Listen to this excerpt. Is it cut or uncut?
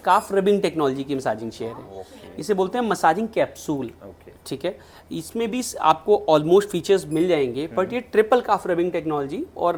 uncut